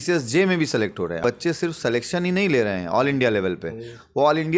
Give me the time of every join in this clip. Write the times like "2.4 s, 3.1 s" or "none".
1.3 s